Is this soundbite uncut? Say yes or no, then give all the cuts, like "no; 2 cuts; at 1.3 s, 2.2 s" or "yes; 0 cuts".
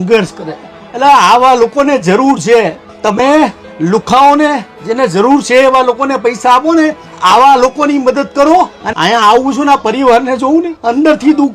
no; 1 cut; at 8.8 s